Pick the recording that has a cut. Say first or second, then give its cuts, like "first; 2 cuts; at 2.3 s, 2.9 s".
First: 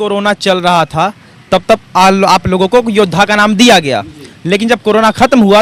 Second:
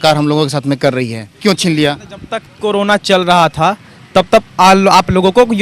second; 1 cut; at 1.3 s